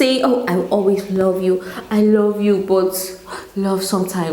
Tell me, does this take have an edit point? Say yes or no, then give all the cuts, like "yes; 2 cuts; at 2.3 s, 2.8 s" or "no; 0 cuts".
no; 0 cuts